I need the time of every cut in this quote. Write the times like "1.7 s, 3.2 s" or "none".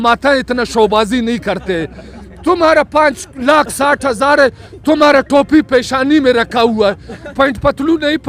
7.3 s